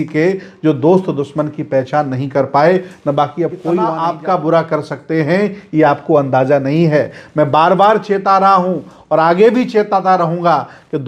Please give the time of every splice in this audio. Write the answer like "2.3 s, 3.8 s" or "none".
4.0 s